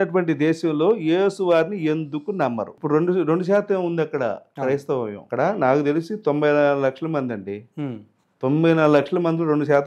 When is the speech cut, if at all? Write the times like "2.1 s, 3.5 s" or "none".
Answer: none